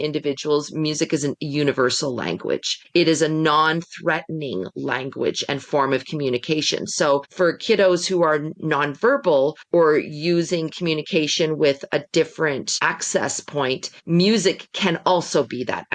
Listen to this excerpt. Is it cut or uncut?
cut